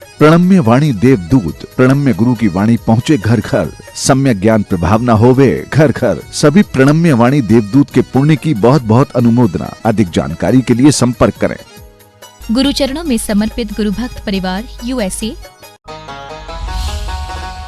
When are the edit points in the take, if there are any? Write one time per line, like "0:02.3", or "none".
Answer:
0:15.6